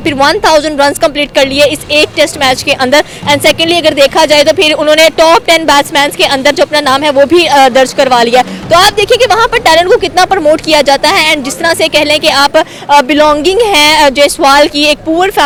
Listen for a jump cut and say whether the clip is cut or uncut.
uncut